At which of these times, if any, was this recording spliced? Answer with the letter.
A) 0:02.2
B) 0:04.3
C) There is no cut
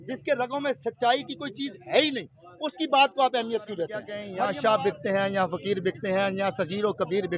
B